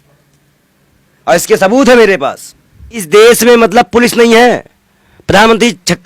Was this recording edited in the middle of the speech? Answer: yes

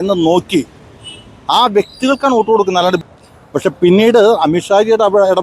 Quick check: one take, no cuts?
no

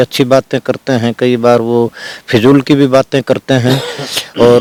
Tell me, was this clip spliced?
no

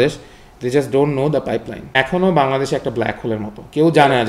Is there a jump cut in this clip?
yes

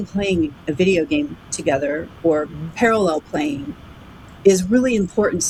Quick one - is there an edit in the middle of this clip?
no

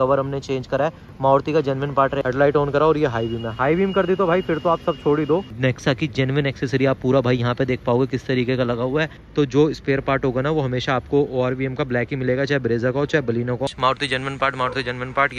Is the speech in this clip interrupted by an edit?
yes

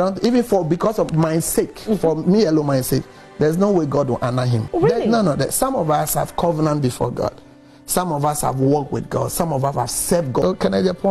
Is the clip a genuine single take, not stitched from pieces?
no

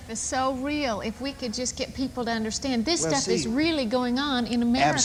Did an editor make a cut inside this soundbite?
no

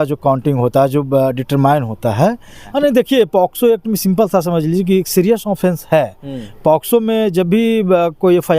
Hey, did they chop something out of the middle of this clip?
yes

